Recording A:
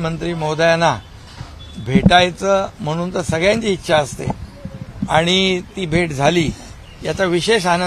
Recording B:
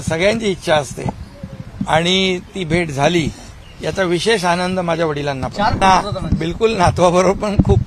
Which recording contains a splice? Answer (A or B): B